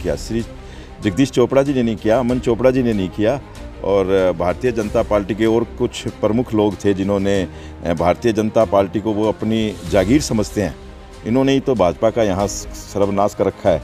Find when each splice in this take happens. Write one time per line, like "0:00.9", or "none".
none

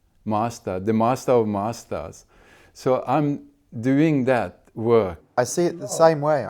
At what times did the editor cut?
0:05.2

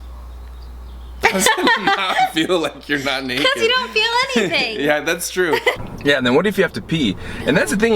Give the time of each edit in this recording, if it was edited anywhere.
0:05.8

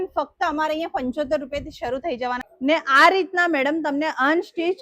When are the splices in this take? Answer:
0:02.5

